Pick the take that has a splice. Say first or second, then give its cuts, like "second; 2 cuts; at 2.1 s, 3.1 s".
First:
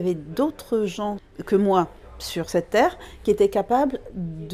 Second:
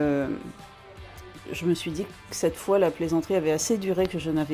first; 1 cut; at 1.3 s